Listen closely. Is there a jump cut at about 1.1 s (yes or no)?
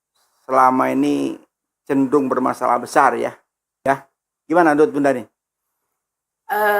no